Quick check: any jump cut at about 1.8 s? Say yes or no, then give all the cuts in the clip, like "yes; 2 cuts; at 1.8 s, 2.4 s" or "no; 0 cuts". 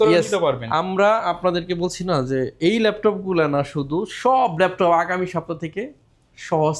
no; 0 cuts